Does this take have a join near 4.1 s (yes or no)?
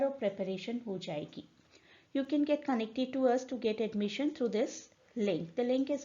yes